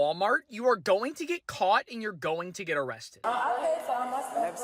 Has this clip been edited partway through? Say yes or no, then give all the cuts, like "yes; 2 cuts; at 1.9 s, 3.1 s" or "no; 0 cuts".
yes; 1 cut; at 3.2 s